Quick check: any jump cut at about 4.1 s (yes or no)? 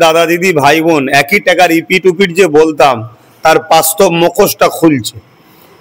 no